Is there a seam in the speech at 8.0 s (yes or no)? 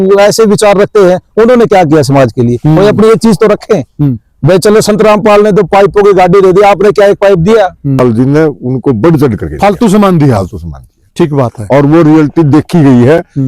yes